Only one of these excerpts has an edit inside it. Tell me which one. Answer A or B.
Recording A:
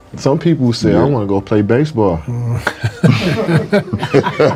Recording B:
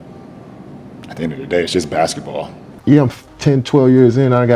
B